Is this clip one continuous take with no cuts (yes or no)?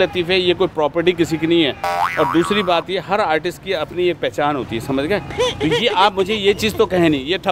yes